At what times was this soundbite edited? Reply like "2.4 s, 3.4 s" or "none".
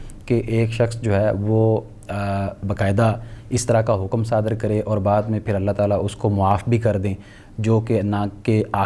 none